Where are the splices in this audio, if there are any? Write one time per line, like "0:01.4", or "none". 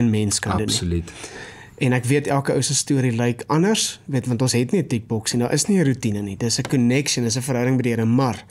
none